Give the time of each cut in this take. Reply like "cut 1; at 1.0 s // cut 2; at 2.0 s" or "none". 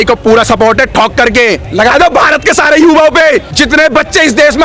cut 1; at 1.6 s // cut 2; at 3.5 s